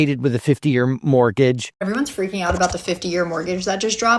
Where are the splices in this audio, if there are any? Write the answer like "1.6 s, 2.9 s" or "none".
1.6 s